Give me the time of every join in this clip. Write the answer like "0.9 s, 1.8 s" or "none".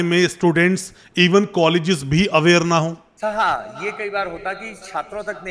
3.1 s

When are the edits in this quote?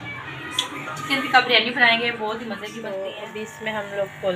2.7 s

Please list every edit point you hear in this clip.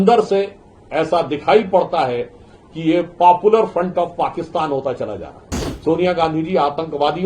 5.7 s

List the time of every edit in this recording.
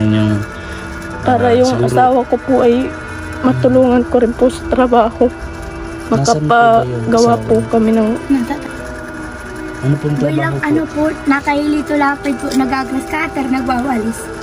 8.7 s

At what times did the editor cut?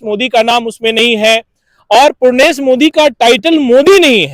none

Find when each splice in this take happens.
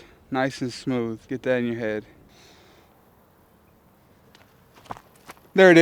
2.3 s

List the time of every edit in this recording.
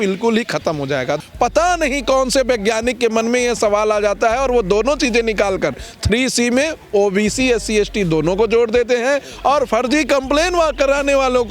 1.2 s

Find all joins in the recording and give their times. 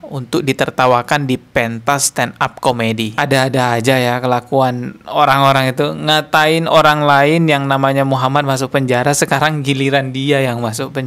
none

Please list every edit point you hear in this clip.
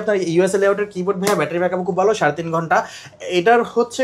none

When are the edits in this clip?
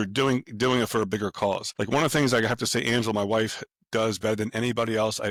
none

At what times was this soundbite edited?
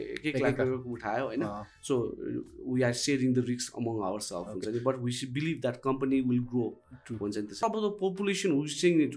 7.6 s

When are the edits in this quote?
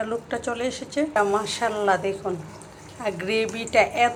none

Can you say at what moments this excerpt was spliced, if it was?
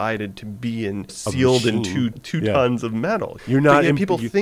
1.2 s, 2.2 s, 3.4 s

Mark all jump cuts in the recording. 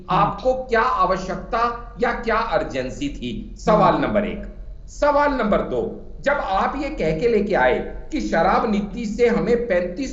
none

